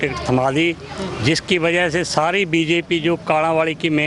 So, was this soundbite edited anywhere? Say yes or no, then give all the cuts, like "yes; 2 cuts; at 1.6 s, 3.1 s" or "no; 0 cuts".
no; 0 cuts